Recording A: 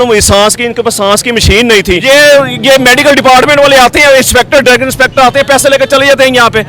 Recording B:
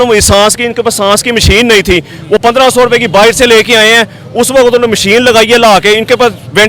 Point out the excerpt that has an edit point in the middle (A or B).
A